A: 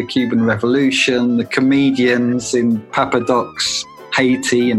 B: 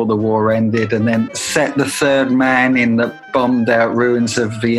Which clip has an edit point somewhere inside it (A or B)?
B